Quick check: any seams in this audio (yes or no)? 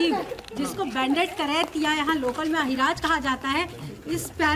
no